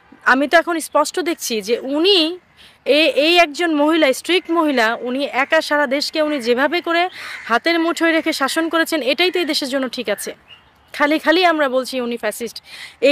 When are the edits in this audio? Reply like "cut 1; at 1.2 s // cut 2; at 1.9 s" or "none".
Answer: none